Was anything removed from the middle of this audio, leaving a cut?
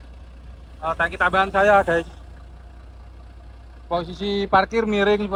no; 0 cuts

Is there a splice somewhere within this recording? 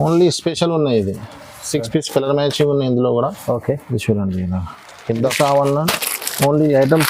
yes; 1 cut; at 5.3 s

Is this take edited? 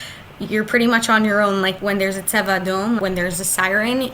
yes; 2 cuts; at 1.8 s, 3.0 s

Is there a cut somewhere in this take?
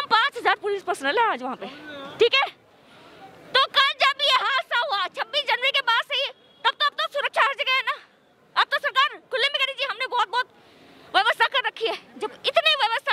no; 0 cuts

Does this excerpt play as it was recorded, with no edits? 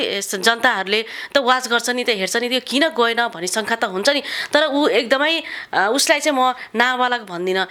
yes; 0 cuts

